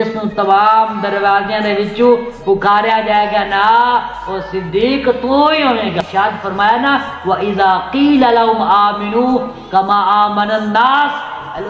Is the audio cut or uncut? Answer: cut